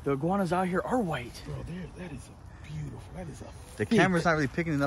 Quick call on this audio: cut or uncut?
uncut